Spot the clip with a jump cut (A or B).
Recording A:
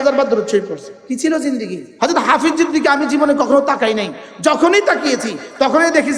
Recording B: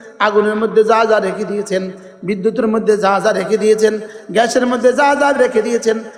A